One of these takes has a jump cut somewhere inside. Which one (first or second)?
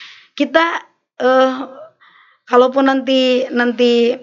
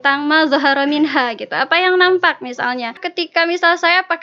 second